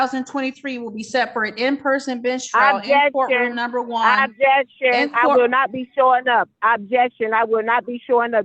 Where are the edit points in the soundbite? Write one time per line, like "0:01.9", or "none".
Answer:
none